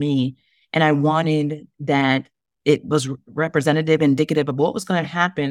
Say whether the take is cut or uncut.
uncut